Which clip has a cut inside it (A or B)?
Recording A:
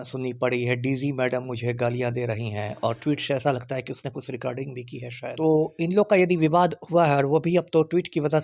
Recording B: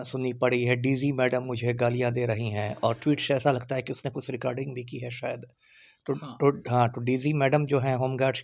A